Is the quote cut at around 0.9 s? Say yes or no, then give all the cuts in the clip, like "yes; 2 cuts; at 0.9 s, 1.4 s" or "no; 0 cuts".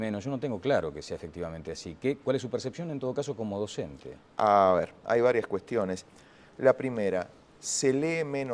no; 1 cut; at 2.6 s